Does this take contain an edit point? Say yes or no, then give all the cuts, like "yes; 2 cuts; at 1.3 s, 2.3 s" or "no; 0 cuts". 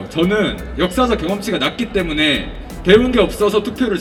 no; 0 cuts